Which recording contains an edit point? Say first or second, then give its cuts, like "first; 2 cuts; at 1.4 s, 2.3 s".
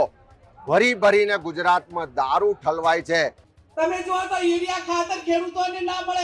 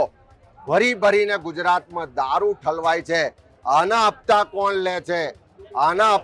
first; 1 cut; at 3.5 s